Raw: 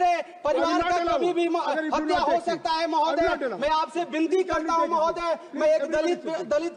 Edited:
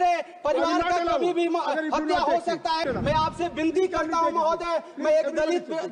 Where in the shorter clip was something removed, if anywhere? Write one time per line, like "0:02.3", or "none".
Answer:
0:02.8